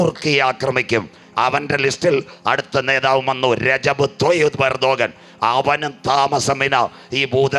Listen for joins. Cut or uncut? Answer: uncut